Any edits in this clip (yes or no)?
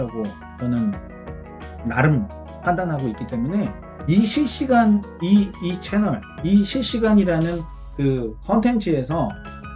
no